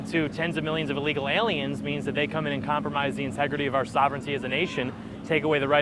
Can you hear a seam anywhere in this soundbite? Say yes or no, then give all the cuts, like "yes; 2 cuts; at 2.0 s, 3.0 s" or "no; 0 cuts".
no; 0 cuts